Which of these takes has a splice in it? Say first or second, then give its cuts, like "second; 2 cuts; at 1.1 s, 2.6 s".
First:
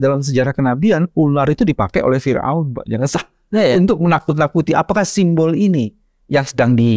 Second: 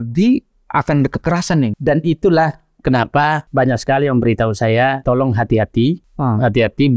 second; 4 cuts; at 1.8 s, 3.4 s, 5.0 s, 6.1 s